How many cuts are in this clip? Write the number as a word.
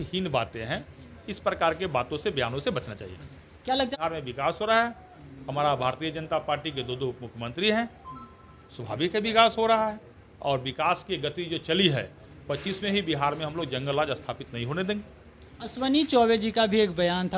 one